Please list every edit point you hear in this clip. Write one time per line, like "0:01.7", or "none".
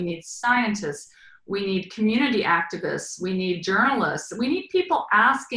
none